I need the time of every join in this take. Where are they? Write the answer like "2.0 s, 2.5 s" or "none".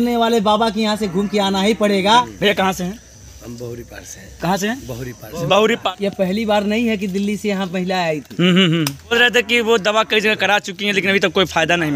2.0 s, 5.9 s, 9.1 s